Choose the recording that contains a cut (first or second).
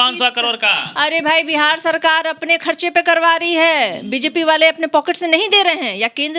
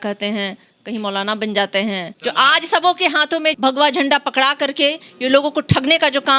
second